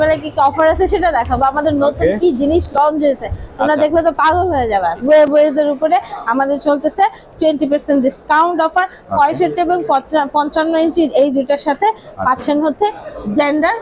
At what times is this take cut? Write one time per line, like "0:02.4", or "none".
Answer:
0:05.0